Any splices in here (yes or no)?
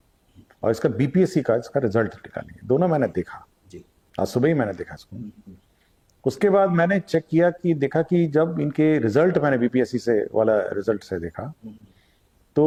no